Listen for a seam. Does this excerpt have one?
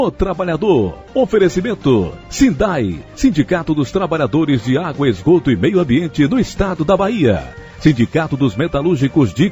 yes; 2 cuts; at 1.0 s, 2.2 s

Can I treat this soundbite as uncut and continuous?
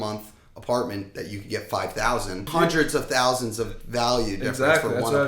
no; 1 cut; at 2.5 s

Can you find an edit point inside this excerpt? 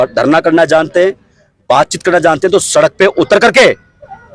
no; 0 cuts

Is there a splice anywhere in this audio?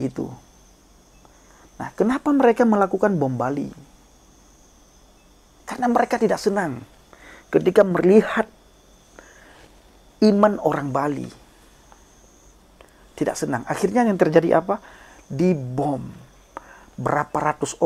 no; 0 cuts

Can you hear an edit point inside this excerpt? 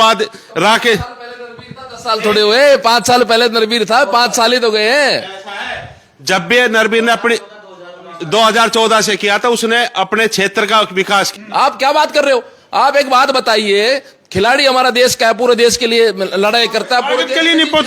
yes; 1 cut; at 11.3 s

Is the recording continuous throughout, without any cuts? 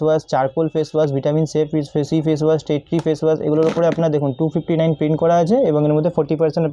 yes; 0 cuts

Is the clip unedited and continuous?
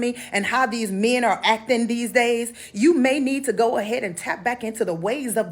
yes; 0 cuts

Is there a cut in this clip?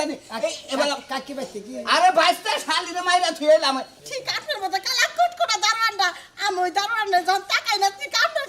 yes; 1 cut; at 3.9 s

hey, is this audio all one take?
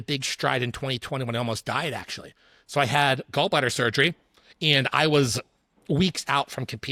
yes; 0 cuts

